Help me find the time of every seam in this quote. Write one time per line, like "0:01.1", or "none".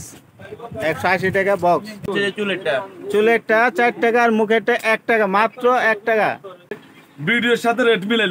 0:02.1
0:06.8

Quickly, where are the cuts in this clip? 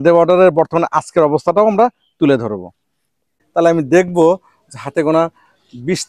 0:03.4

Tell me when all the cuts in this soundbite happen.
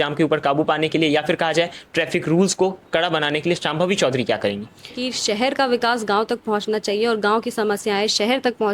0:05.0

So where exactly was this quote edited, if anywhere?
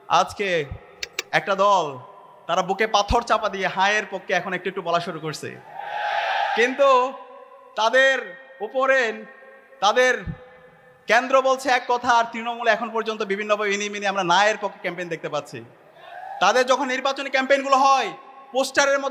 none

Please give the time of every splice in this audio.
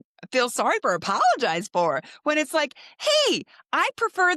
none

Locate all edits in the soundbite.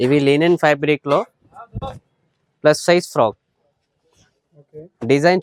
none

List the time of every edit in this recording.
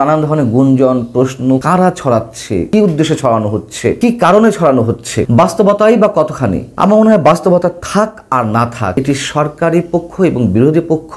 0:01.6
0:02.7
0:04.0
0:05.1
0:06.6
0:08.9

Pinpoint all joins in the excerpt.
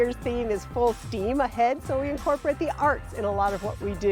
none

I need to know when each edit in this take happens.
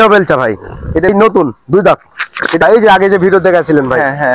0:01.1
0:02.6

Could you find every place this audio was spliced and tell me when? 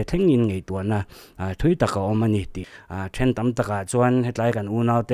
0:02.7

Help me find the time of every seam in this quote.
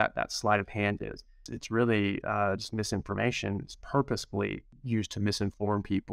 0:01.5
0:04.7

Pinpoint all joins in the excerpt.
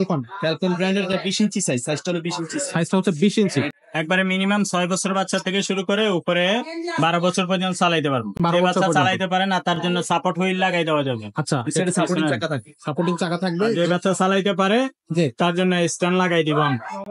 0:03.8

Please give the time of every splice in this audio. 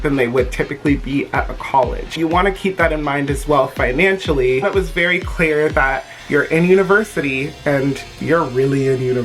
0:02.1
0:04.6
0:06.2

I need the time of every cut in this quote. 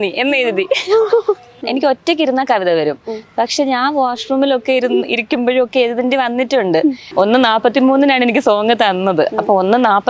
0:01.6
0:07.0

